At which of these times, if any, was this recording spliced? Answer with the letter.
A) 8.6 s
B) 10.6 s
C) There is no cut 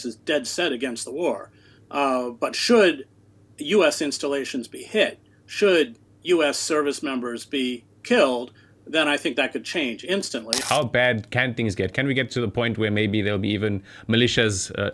B